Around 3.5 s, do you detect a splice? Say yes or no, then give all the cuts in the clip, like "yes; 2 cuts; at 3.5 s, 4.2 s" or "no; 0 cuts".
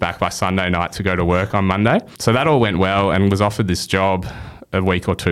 no; 1 cut; at 2.1 s